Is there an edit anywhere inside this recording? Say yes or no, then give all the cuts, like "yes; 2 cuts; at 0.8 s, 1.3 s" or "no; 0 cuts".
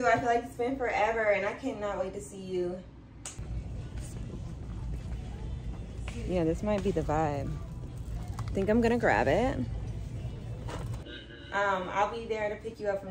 yes; 2 cuts; at 3.4 s, 11.0 s